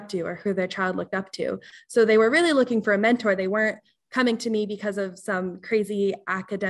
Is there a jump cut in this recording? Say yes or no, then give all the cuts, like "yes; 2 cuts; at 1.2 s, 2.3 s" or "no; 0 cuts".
no; 0 cuts